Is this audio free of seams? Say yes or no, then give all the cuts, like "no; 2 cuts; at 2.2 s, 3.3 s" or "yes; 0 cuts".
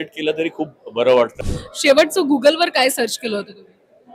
no; 1 cut; at 1.4 s